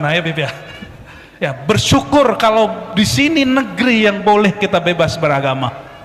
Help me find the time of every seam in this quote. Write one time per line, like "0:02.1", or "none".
none